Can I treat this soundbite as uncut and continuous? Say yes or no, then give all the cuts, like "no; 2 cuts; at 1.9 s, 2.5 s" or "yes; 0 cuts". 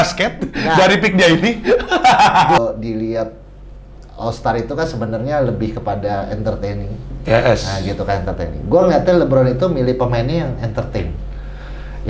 no; 1 cut; at 2.6 s